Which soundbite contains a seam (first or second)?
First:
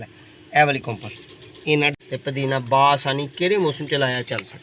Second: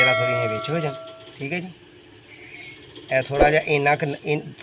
first